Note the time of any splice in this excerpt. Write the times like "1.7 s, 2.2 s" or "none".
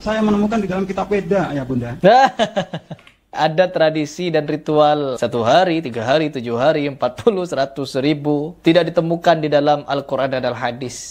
1.9 s, 3.3 s, 5.2 s, 8.5 s